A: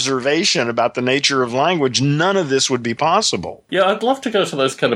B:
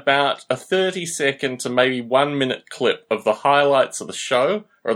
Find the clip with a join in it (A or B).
A